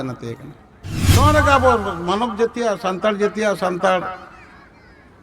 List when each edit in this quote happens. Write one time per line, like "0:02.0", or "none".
0:01.2